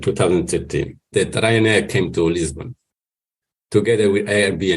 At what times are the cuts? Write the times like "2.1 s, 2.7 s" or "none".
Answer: 1.1 s